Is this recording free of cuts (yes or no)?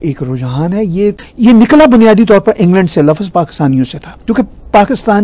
no